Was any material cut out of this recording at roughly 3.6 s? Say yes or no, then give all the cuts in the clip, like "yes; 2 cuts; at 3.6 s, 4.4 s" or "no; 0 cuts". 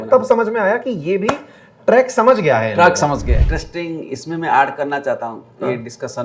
yes; 1 cut; at 3.6 s